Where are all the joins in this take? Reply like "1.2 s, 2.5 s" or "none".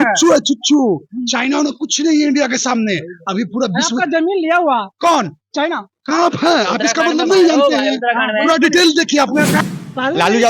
9.6 s